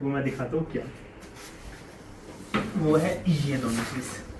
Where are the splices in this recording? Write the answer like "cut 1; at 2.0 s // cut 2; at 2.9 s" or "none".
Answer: none